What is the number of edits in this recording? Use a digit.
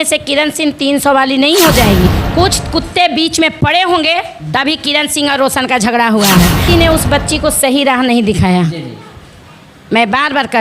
2